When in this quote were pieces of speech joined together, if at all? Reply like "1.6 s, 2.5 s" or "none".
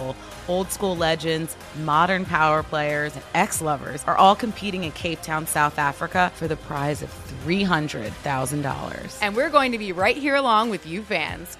3.5 s, 6.3 s

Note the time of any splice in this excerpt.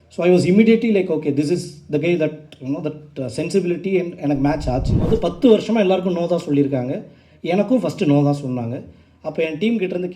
5.0 s

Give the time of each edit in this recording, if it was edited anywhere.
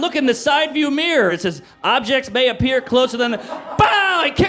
1.3 s

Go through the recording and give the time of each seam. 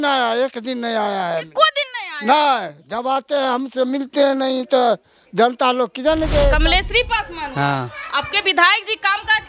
6.6 s

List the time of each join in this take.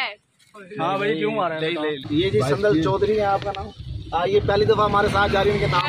2.1 s

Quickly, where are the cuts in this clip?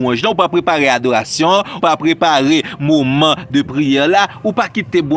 1.8 s

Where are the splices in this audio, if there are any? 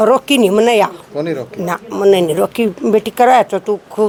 none

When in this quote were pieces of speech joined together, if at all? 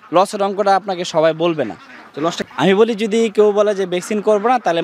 2.4 s

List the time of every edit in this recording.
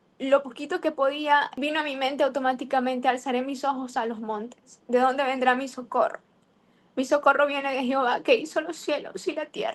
1.5 s

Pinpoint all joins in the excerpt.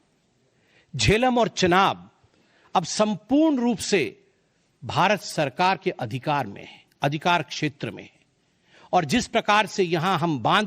5.3 s

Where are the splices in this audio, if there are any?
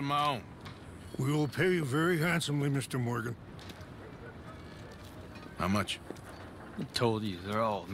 none

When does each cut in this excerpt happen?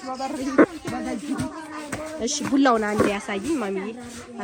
none

